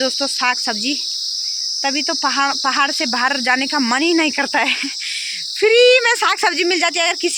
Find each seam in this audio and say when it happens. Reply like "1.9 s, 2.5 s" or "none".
none